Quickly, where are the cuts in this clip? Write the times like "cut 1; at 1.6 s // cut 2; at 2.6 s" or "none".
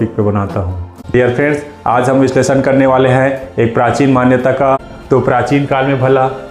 cut 1; at 1.0 s // cut 2; at 4.9 s